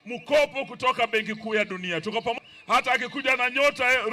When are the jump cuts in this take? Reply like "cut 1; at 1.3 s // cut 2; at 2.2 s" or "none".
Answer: cut 1; at 2.4 s